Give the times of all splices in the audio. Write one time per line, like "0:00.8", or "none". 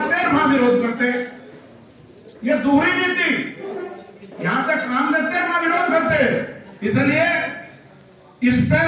none